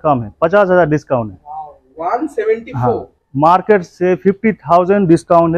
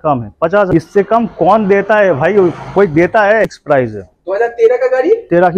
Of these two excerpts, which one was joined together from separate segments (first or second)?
second